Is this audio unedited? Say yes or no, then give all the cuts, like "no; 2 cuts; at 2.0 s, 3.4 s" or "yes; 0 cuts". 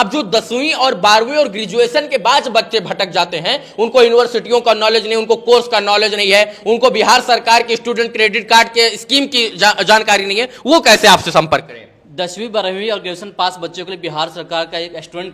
yes; 0 cuts